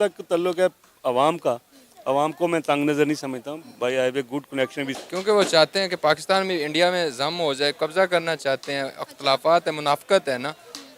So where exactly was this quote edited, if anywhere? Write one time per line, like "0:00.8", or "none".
0:04.9